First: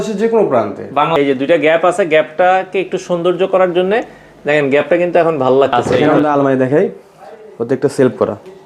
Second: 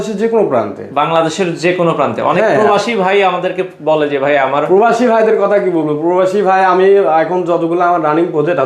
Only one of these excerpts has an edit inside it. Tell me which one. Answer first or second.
first